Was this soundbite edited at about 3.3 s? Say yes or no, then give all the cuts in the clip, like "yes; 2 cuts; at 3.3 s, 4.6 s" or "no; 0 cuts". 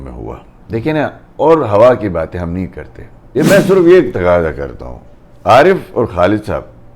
yes; 1 cut; at 3.3 s